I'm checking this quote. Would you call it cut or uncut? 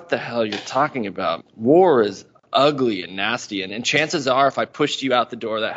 cut